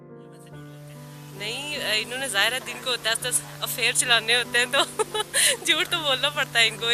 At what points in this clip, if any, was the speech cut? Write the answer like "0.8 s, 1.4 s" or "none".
1.4 s

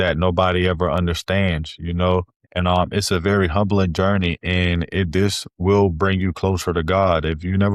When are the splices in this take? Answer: 2.5 s

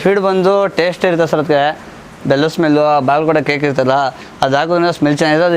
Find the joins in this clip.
none

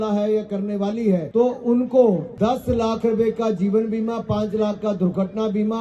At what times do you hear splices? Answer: 1.3 s, 2.3 s

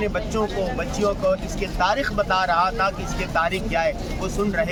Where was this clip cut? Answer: none

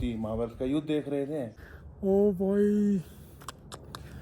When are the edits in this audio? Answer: 1.6 s

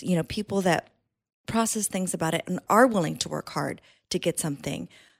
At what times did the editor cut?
none

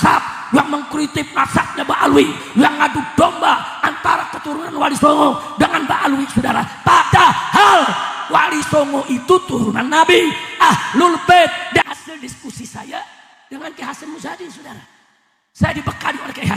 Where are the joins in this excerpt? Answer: 11.9 s

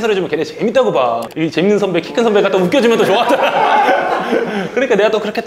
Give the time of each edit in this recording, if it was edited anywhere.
none

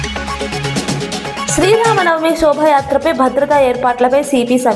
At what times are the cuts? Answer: 1.5 s

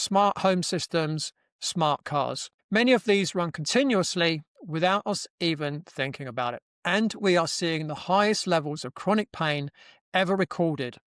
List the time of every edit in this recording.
2.5 s, 6.7 s

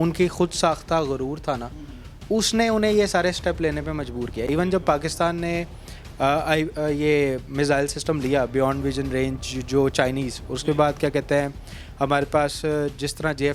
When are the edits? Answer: none

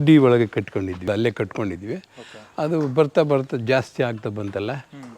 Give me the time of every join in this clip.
1.1 s

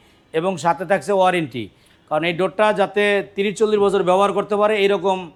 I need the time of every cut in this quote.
none

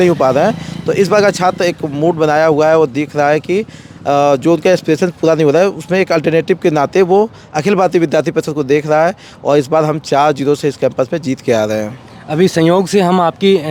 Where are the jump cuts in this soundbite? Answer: none

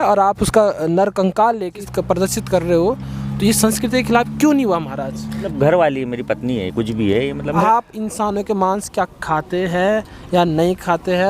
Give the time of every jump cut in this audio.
1.8 s, 5.4 s, 7.6 s

